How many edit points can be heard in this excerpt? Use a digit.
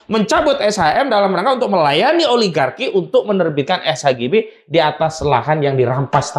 0